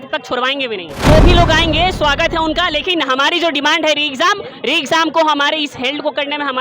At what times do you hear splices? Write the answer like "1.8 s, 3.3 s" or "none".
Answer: 0.9 s